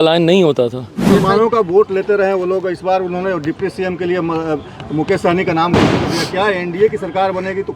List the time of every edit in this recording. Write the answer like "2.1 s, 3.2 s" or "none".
1.1 s